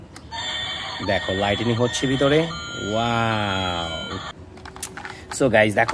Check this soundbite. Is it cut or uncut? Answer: cut